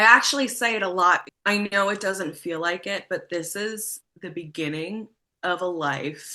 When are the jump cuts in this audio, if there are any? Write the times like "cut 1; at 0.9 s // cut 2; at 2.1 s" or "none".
cut 1; at 1.3 s